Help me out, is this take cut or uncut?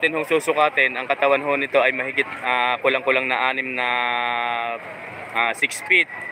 uncut